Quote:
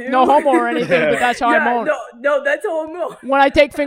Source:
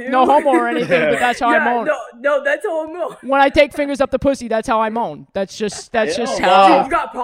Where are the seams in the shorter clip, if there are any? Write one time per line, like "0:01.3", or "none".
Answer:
none